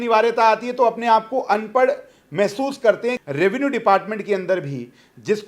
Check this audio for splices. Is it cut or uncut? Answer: cut